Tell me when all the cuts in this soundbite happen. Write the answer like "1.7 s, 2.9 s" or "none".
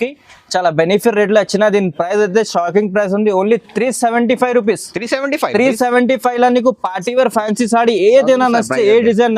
none